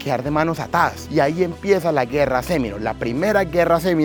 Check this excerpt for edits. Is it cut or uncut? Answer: uncut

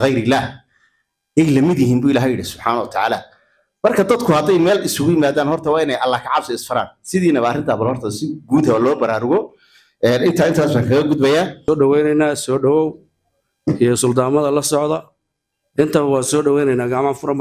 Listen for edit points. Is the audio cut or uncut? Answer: cut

